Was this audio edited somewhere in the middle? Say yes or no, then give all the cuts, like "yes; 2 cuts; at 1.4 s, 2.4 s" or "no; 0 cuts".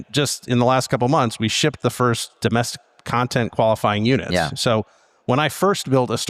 no; 0 cuts